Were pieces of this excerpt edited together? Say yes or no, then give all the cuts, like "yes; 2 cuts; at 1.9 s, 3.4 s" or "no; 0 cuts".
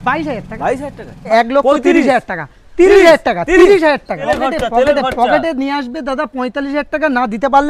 yes; 2 cuts; at 1.3 s, 4.2 s